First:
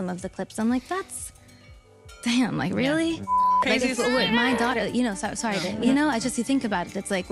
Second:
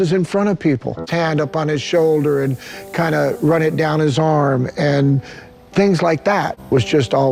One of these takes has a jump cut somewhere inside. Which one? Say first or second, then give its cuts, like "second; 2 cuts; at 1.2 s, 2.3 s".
first; 3 cuts; at 2.2 s, 3.3 s, 5.8 s